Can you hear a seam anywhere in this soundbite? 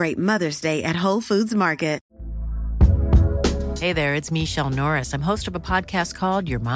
yes; 1 cut; at 2.1 s

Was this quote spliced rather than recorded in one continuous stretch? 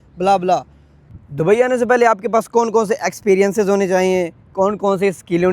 yes; 1 cut; at 1.0 s

